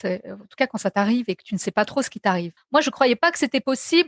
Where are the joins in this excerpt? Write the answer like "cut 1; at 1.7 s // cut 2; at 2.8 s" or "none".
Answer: cut 1; at 2.6 s